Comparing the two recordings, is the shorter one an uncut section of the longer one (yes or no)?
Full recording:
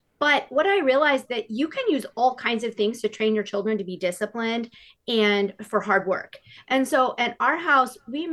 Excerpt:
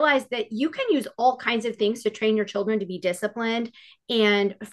yes